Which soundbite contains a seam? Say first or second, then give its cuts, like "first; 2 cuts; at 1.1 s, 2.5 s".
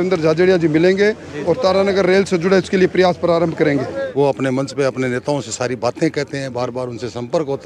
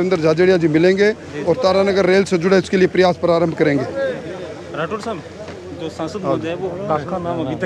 first; 1 cut; at 4.1 s